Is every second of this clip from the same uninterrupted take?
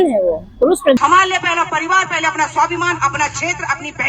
no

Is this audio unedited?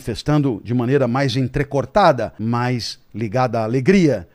no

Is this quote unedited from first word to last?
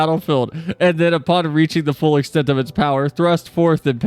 yes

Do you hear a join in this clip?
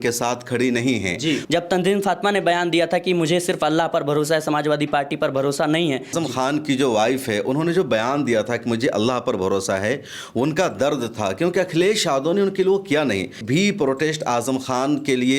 yes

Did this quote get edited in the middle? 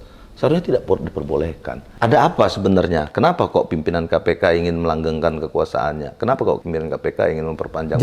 yes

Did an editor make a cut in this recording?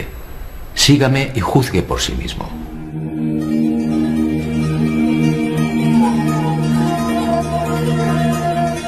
no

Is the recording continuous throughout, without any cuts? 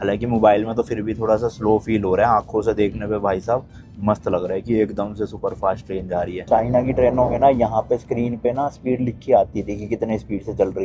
yes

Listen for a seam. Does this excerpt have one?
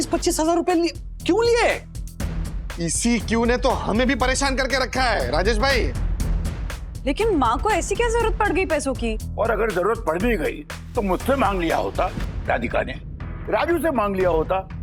no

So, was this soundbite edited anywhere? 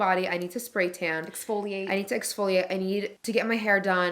yes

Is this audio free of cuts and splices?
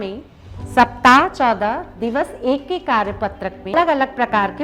no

